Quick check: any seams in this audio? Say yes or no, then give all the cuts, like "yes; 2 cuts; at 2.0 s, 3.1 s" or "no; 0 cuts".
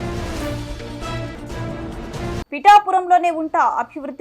yes; 1 cut; at 1.5 s